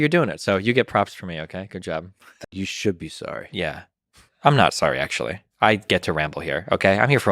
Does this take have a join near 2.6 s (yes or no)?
yes